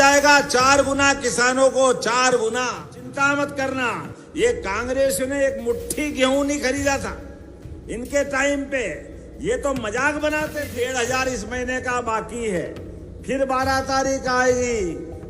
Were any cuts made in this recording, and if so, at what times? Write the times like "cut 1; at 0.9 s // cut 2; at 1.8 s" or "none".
cut 1; at 3.1 s // cut 2; at 10.6 s